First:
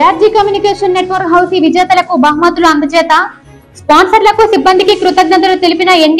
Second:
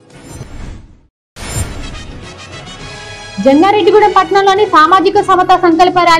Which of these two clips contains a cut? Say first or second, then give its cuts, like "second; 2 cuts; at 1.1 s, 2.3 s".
second; 2 cuts; at 1.0 s, 3.3 s